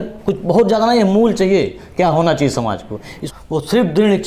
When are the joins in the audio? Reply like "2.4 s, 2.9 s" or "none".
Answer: 3.2 s